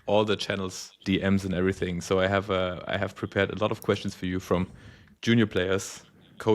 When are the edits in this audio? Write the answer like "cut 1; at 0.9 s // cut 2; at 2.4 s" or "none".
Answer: cut 1; at 1.0 s